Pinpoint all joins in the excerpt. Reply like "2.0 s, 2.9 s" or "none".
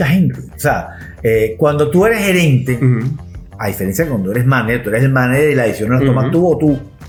none